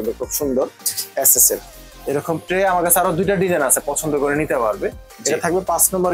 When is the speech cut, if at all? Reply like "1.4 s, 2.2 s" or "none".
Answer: none